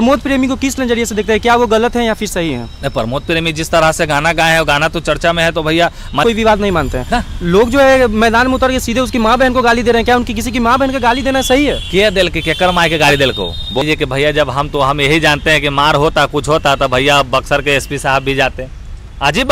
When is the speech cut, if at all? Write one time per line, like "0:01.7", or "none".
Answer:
0:06.2
0:13.8